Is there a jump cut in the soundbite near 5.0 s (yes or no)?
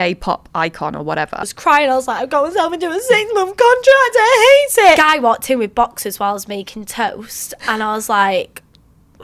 yes